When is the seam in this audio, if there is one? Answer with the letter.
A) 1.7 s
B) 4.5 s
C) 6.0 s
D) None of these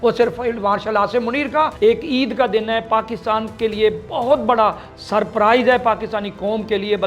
A